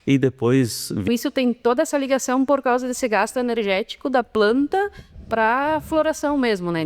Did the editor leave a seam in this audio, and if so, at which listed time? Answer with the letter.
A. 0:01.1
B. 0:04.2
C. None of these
A